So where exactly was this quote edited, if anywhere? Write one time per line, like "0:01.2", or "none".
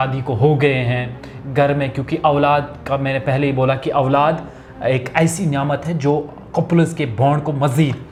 none